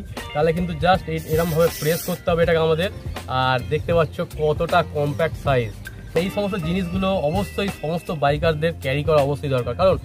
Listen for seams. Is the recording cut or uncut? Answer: cut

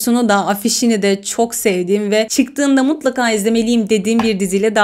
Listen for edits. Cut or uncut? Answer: uncut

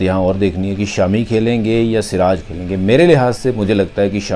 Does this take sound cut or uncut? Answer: uncut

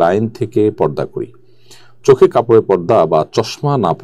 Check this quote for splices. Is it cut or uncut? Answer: uncut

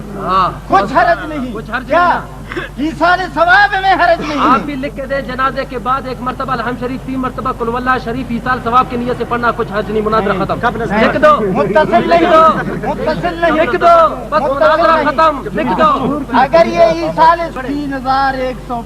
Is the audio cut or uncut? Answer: cut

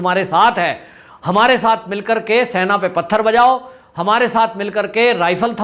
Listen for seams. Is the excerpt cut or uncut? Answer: uncut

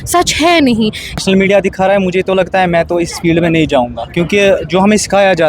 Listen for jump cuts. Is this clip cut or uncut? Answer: cut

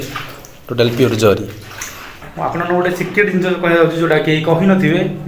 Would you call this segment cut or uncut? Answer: cut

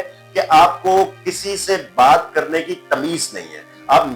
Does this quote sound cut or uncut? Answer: uncut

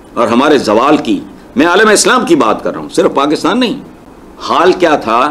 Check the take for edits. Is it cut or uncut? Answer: cut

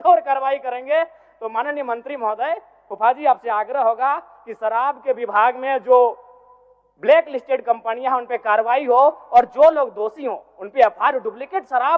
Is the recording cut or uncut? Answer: uncut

